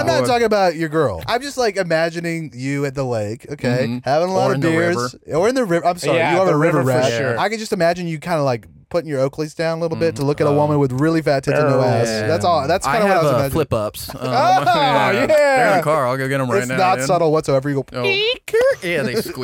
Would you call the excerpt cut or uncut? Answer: cut